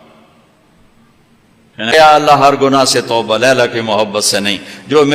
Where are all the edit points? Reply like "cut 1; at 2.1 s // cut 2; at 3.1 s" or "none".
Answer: cut 1; at 1.9 s